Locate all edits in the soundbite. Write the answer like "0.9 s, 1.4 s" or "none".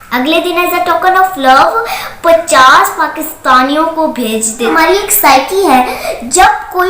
4.7 s